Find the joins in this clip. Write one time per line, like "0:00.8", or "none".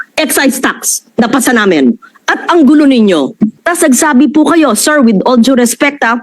0:02.1
0:03.6